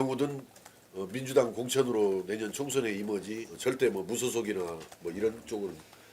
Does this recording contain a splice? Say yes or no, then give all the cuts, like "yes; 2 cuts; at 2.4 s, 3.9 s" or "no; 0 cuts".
yes; 1 cut; at 3.5 s